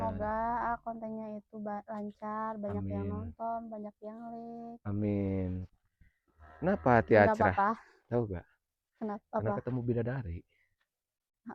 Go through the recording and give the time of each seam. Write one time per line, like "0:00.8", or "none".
0:05.6